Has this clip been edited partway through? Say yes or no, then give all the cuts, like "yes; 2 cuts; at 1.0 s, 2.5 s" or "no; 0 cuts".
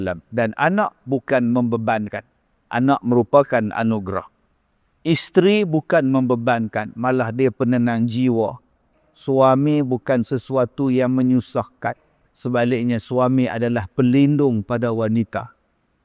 no; 0 cuts